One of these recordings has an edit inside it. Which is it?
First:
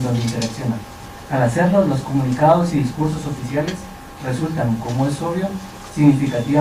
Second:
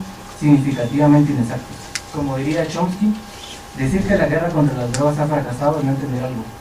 second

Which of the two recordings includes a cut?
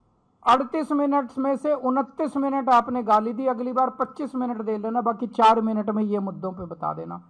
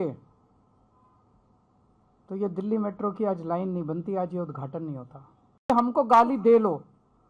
second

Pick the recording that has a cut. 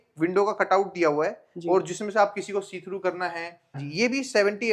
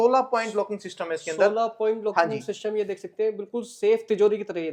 first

